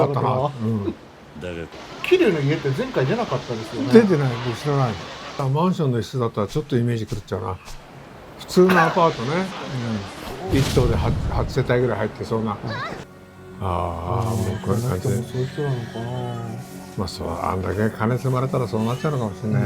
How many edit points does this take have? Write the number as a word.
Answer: three